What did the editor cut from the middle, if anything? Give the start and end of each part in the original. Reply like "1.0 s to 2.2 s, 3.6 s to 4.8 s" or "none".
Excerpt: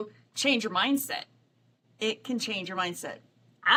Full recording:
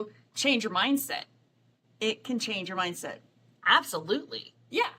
none